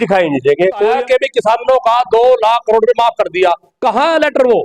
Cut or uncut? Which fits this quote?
cut